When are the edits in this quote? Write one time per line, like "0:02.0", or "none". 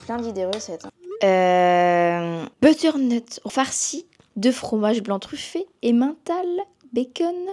none